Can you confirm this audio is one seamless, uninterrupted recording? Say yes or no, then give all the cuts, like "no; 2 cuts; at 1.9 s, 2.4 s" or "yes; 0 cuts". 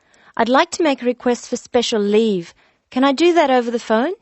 yes; 0 cuts